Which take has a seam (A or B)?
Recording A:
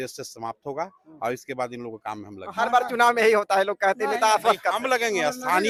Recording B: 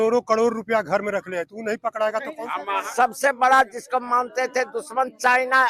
B